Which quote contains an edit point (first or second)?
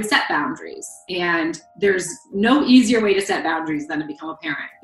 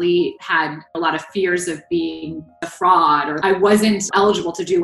second